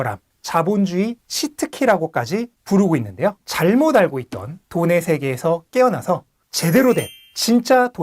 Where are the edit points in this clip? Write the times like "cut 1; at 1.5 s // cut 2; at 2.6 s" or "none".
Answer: cut 1; at 3.4 s